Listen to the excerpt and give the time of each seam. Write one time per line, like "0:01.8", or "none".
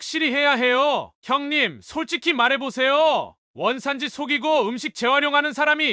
0:01.1